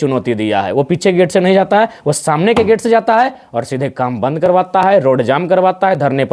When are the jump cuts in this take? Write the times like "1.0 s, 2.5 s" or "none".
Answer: none